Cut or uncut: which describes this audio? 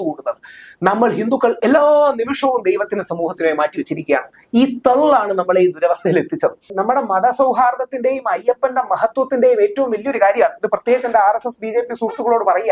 cut